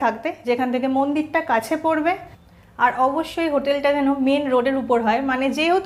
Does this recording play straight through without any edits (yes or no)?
yes